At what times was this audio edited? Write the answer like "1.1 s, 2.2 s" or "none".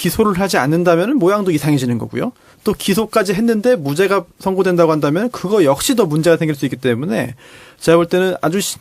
4.1 s